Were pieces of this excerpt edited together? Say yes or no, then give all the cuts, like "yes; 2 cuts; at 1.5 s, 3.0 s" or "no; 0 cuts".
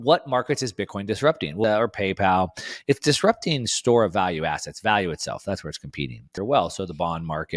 yes; 2 cuts; at 1.6 s, 6.4 s